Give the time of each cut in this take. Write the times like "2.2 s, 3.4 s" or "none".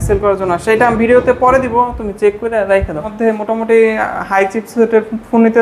3.1 s